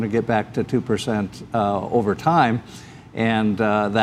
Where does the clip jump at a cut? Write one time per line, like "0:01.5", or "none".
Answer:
none